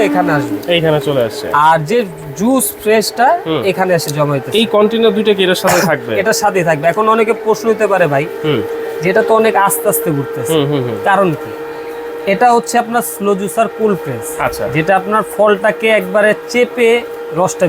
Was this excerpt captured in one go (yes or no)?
yes